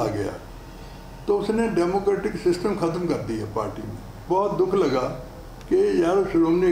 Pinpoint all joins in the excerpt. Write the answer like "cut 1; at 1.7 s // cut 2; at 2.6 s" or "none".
cut 1; at 4.2 s